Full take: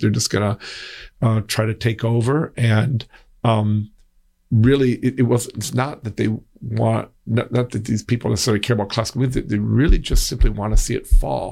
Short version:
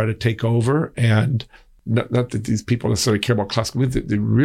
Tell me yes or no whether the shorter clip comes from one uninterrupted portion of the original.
no